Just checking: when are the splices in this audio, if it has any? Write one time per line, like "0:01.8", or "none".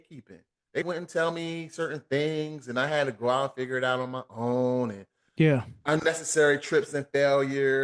none